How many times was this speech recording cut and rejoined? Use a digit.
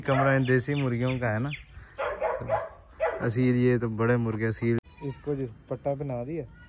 1